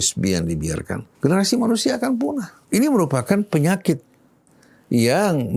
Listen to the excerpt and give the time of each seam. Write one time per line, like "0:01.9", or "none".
0:01.0
0:02.5